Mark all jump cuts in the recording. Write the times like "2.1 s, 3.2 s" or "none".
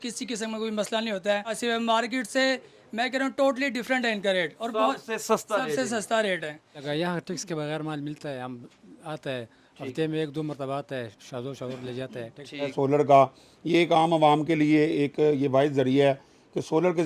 1.6 s, 6.8 s, 12.7 s